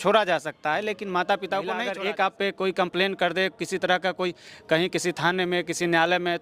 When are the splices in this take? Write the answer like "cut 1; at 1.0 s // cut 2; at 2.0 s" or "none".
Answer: cut 1; at 1.9 s